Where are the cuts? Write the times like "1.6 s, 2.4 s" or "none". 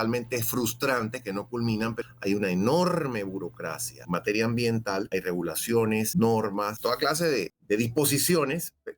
2.0 s, 3.9 s, 5.1 s, 6.1 s, 7.1 s